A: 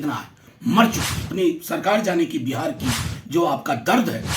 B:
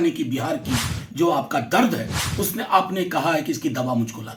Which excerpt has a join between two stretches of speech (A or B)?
A